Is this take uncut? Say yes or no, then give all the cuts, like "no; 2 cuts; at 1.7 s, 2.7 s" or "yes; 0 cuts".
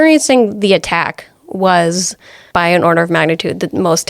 no; 1 cut; at 2.4 s